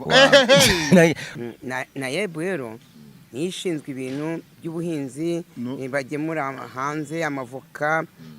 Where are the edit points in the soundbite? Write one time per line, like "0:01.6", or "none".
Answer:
0:01.3